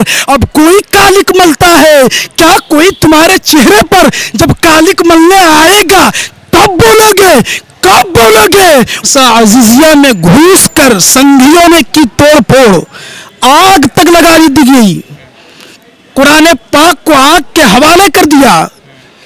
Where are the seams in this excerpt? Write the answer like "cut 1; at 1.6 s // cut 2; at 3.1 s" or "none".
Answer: cut 1; at 9.0 s